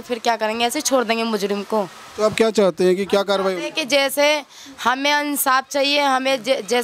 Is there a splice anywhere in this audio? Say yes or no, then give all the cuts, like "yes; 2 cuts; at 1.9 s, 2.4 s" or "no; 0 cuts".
no; 0 cuts